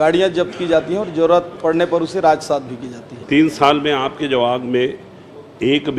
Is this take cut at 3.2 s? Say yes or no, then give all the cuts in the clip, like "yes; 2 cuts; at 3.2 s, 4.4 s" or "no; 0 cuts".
yes; 1 cut; at 3.2 s